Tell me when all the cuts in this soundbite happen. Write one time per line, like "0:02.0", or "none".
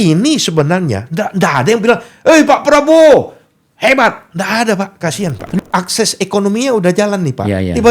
0:05.6